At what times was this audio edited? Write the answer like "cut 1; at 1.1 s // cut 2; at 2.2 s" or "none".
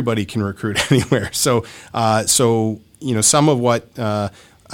none